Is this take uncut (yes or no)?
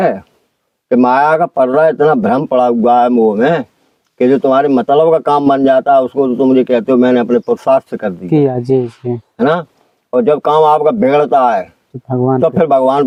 yes